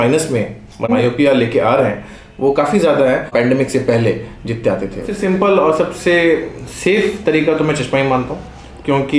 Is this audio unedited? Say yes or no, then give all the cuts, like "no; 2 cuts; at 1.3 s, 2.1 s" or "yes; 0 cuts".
no; 1 cut; at 5.1 s